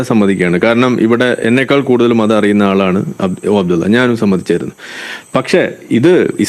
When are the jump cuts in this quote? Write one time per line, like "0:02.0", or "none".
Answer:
none